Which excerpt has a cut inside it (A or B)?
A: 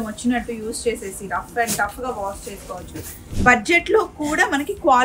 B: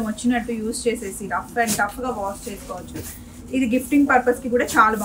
A